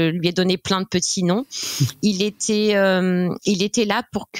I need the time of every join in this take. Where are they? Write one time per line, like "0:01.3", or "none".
none